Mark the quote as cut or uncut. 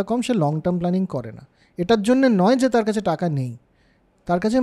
uncut